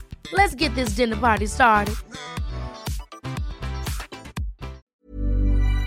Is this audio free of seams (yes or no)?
no